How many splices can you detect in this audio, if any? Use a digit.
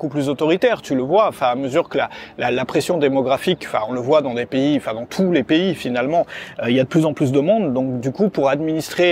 0